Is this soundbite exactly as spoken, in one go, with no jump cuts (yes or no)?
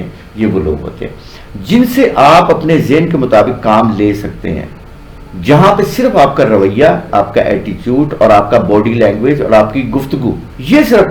yes